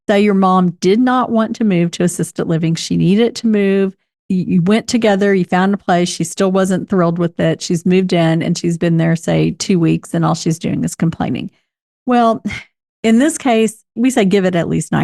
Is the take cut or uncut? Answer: cut